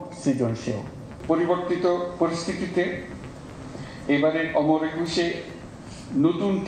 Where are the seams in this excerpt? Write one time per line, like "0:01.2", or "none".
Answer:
0:01.1